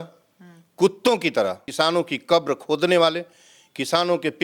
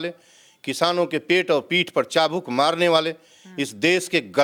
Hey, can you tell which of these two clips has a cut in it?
first; 1 cut; at 1.6 s

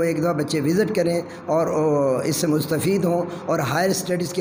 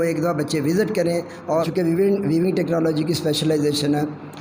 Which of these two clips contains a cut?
second; 1 cut; at 1.7 s

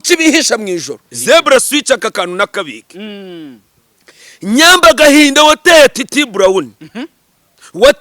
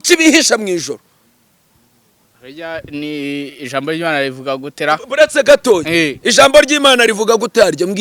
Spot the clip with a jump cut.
first; 1 cut; at 1.0 s

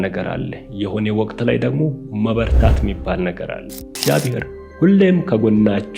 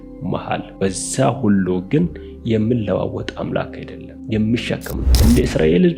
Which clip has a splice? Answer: first; 1 cut; at 3.9 s

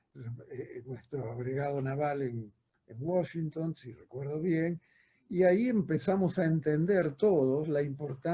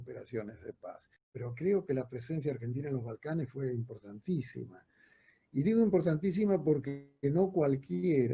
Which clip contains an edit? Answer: second; 1 cut; at 1.3 s

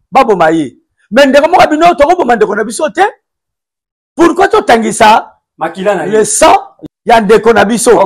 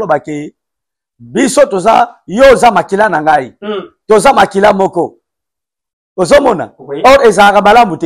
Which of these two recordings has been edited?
first; 1 cut; at 6.7 s

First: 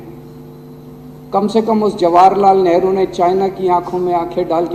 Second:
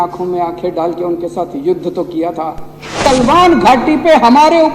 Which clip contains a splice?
second; 1 cut; at 3.0 s

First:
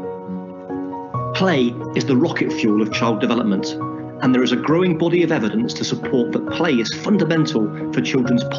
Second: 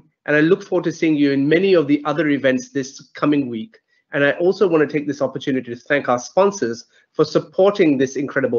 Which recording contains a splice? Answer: second; 1 cut; at 1.2 s

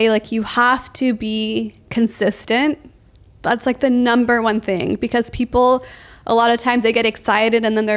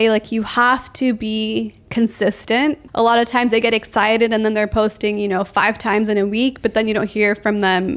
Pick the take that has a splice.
second; 1 cut; at 2.9 s

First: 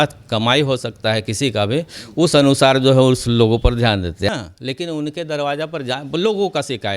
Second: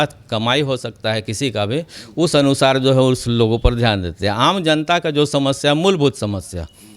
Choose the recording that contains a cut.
first; 1 cut; at 4.3 s

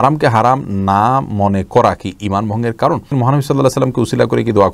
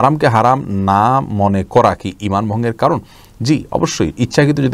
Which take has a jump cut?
first; 1 cut; at 3.1 s

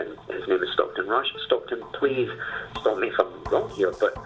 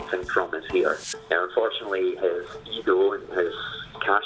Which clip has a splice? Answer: second; 1 cut; at 1.0 s

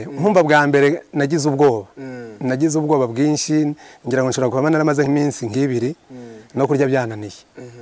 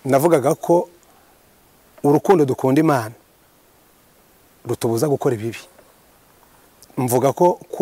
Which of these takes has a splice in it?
first; 1 cut; at 5.1 s

